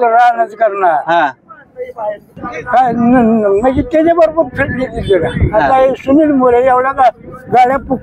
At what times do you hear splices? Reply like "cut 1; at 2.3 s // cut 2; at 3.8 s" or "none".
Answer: cut 1; at 2.5 s